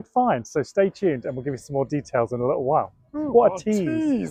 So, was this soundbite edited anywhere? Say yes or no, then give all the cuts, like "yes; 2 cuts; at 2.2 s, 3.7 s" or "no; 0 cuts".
no; 0 cuts